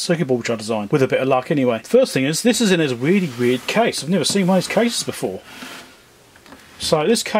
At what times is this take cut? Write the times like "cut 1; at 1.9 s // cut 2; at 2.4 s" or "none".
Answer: cut 1; at 0.8 s // cut 2; at 1.8 s